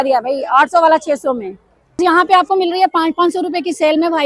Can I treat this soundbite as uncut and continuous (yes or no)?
no